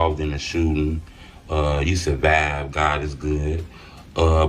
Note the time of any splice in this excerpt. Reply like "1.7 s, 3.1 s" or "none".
none